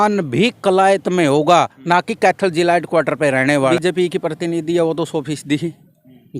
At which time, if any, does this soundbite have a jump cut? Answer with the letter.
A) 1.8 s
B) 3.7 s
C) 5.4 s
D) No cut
B